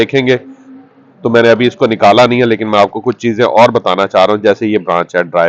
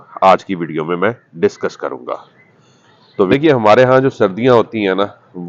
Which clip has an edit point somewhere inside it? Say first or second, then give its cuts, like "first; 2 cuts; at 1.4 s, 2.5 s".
second; 1 cut; at 3.3 s